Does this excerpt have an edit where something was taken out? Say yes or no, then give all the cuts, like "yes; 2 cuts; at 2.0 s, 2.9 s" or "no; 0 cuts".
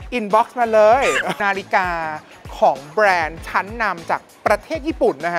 yes; 1 cut; at 1.4 s